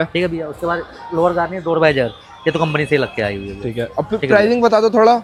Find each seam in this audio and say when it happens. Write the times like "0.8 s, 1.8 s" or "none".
none

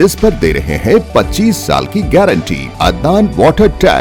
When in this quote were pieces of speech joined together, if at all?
2.7 s

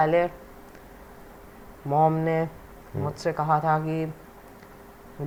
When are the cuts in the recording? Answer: none

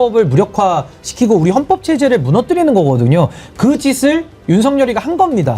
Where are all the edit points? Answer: none

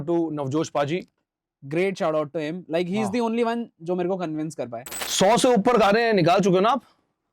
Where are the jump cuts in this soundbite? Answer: 4.9 s

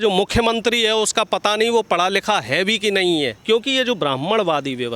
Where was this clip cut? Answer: 3.4 s

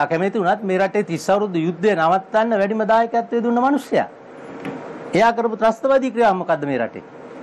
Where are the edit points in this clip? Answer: none

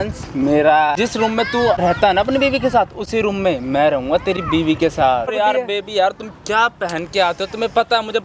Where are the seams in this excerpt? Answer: 1.5 s, 5.3 s

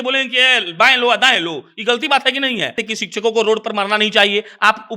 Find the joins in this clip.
2.8 s

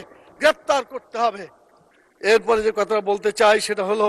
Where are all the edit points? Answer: none

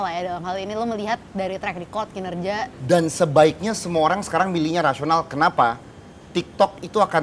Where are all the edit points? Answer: none

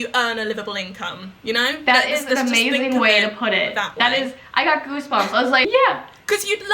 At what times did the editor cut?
5.6 s

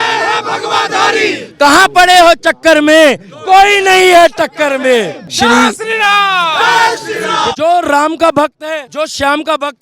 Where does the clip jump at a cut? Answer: 5.2 s, 7.5 s, 8.9 s

